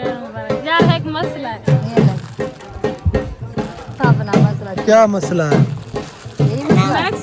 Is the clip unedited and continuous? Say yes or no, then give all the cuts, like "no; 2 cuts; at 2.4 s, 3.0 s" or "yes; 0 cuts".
yes; 0 cuts